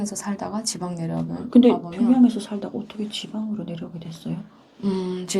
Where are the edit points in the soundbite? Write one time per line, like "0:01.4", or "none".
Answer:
none